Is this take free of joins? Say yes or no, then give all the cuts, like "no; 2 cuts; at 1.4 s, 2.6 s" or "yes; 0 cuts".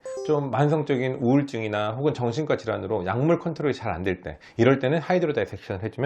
yes; 0 cuts